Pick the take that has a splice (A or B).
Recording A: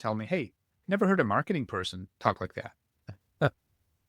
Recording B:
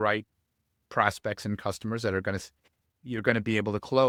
A